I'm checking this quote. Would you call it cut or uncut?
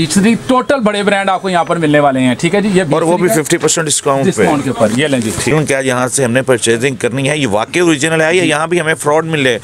cut